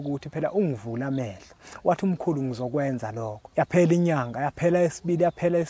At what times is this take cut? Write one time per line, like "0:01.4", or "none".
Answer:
0:03.4

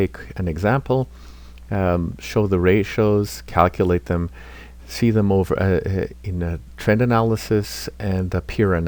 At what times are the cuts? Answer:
none

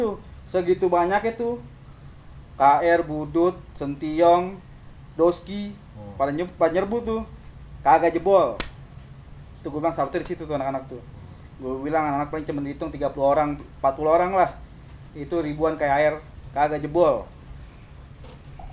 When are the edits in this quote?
none

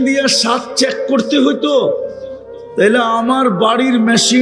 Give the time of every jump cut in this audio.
none

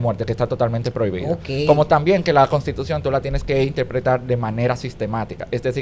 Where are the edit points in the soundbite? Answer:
none

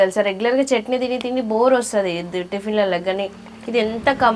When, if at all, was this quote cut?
none

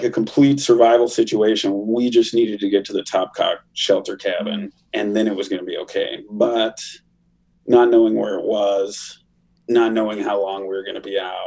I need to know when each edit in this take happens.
0:04.8

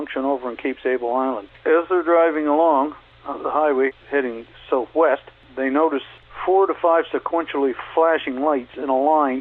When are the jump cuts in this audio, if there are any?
0:01.5
0:03.1
0:03.9
0:05.4
0:06.1

